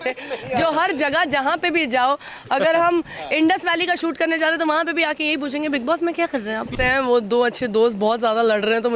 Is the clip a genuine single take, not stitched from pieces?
no; 1 cut; at 6.7 s

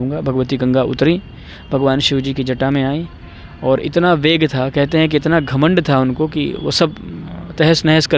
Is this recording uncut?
yes; 0 cuts

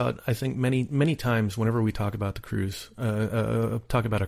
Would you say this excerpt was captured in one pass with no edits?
yes; 0 cuts

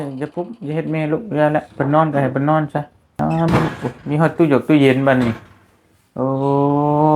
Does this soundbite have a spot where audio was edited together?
yes; 1 cut; at 3.1 s

